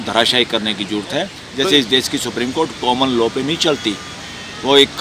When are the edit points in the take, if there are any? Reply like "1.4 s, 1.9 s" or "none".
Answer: 1.4 s